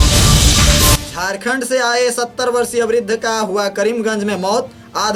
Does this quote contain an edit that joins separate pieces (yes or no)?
no